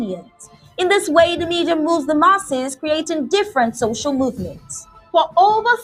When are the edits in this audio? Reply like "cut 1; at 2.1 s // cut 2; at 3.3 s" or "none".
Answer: none